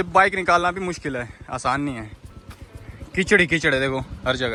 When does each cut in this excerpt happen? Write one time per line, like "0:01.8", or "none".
none